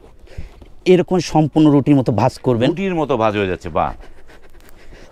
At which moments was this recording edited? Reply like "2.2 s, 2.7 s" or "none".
none